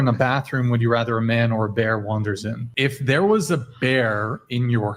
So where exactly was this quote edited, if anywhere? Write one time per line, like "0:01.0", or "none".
0:02.6